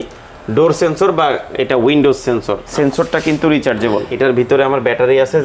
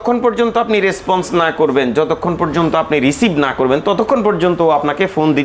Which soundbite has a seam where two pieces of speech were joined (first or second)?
first